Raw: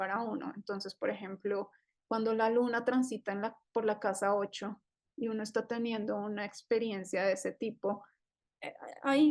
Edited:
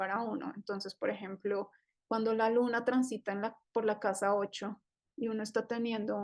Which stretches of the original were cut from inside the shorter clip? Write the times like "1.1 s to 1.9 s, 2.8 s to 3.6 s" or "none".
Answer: none